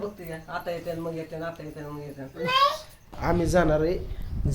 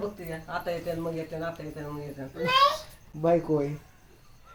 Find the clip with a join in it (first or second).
first